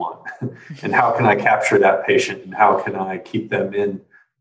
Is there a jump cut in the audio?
no; 0 cuts

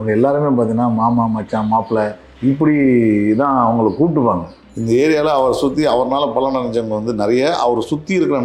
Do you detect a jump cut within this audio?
yes; 2 cuts; at 2.2 s, 4.6 s

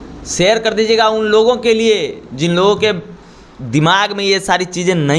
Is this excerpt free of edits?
yes; 0 cuts

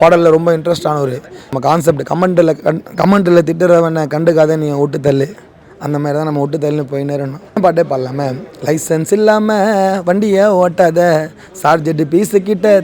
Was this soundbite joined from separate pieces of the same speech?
yes; 2 cuts; at 1.4 s, 7.6 s

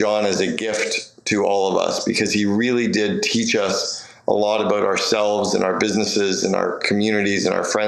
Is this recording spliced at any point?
no; 0 cuts

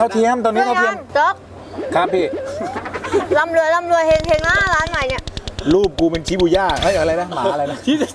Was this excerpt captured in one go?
yes; 0 cuts

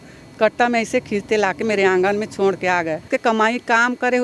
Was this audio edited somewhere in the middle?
yes; 1 cut; at 3.1 s

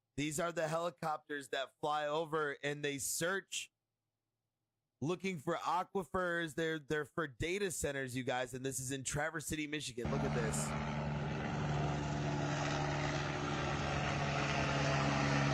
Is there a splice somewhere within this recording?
no; 0 cuts

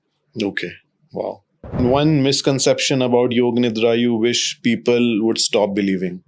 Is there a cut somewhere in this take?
yes; 1 cut; at 1.8 s

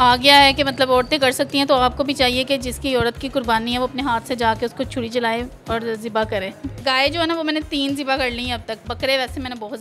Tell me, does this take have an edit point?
yes; 2 cuts; at 6.8 s, 8.8 s

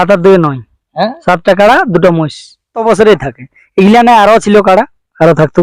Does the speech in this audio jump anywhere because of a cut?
yes; 1 cut; at 2.8 s

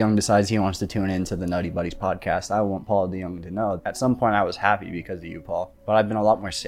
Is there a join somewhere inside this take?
yes; 2 cuts; at 3.8 s, 5.8 s

